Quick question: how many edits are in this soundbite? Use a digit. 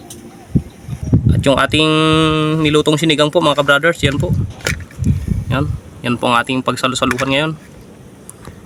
0